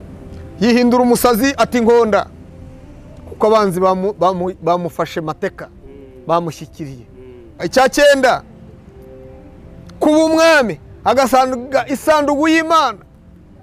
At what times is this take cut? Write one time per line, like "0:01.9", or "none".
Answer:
0:07.6